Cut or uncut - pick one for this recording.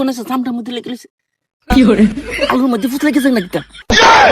uncut